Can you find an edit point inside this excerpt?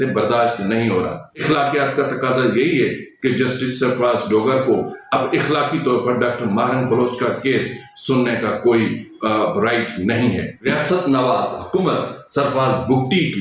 yes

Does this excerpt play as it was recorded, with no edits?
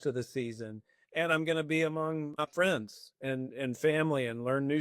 no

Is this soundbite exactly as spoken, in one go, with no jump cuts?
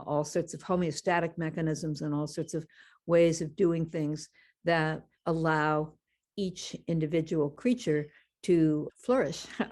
no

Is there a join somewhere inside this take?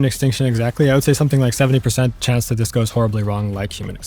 no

